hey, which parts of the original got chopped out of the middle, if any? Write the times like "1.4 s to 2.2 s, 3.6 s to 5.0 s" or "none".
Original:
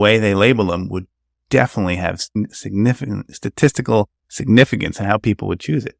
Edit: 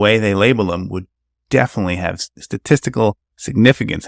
2.3 s to 3.2 s